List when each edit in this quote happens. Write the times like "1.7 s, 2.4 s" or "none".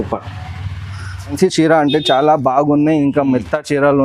1.3 s